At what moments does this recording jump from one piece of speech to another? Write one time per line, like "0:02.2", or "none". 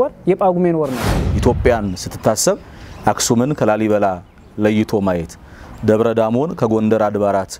0:01.2